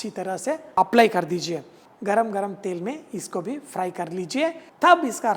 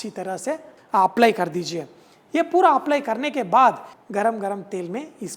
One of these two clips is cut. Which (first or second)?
first